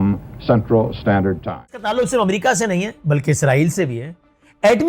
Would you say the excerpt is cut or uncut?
cut